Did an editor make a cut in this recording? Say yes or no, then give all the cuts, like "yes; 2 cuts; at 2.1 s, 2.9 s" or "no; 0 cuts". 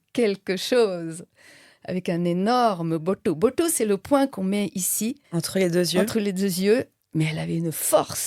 yes; 2 cuts; at 5.2 s, 7.0 s